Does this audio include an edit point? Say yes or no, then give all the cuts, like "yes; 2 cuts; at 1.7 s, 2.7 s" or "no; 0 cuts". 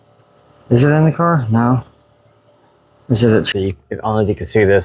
yes; 1 cut; at 3.5 s